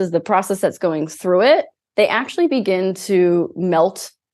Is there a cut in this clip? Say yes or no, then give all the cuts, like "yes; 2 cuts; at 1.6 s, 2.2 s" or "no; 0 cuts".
no; 0 cuts